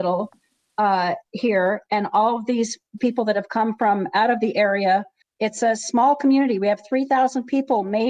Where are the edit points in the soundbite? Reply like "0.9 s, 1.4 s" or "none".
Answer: 5.2 s